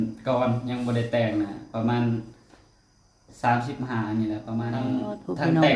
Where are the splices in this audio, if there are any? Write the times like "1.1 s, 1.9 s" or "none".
4.8 s

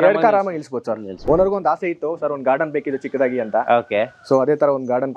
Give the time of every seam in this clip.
1.2 s

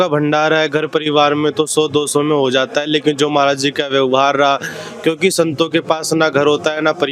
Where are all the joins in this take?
none

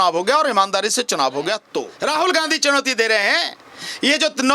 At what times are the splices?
1.9 s

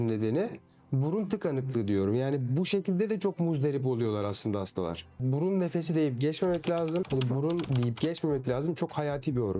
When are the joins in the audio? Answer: 5.2 s, 7.4 s

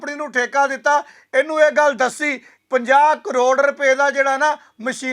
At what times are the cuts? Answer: 2.5 s

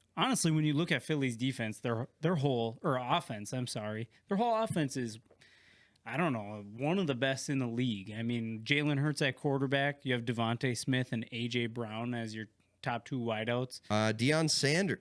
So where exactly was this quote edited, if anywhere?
13.8 s

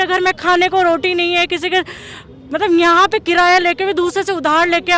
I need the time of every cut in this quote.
none

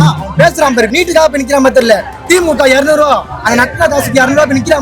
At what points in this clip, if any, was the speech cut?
0.9 s

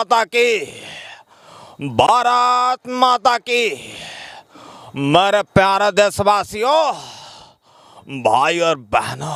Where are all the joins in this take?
none

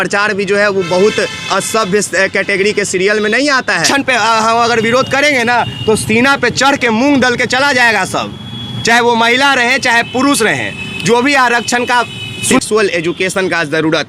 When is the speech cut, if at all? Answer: 3.8 s, 12.6 s

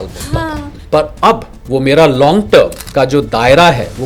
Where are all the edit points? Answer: 1.5 s, 2.8 s

